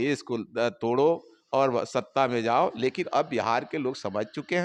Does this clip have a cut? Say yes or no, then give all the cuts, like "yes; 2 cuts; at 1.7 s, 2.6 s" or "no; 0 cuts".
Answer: no; 0 cuts